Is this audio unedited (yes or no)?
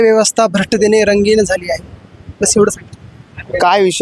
yes